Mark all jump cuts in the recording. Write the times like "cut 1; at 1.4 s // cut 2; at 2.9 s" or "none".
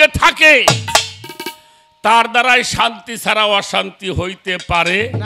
none

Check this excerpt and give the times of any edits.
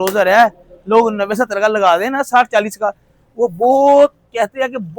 none

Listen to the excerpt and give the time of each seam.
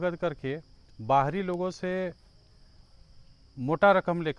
none

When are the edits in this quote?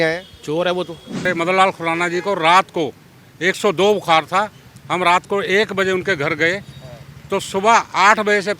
cut 1; at 1.2 s

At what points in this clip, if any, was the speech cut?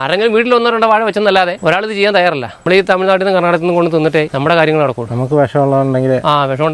cut 1; at 1.6 s // cut 2; at 2.6 s // cut 3; at 4.3 s

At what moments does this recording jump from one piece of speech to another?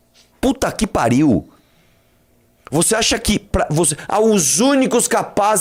none

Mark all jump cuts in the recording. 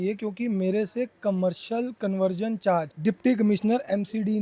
cut 1; at 2.9 s

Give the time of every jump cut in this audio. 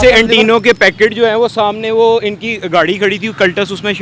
none

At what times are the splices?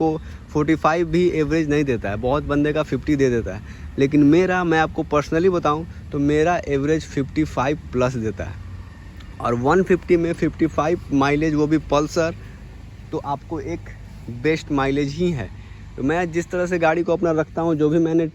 none

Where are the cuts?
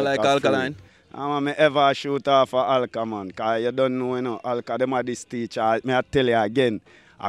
none

